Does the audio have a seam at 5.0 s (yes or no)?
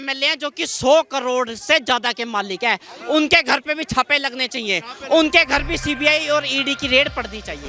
no